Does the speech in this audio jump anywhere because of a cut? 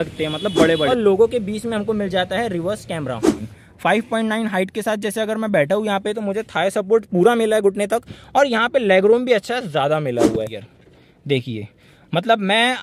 yes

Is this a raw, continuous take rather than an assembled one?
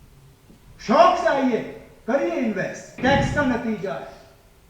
no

